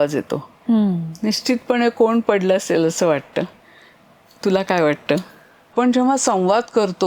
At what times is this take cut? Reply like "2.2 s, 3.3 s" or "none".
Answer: 5.7 s